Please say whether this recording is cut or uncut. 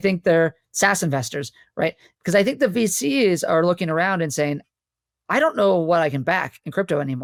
uncut